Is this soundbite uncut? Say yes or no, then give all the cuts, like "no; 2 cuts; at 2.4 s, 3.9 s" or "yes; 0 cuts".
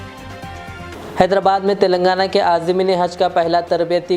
no; 1 cut; at 0.9 s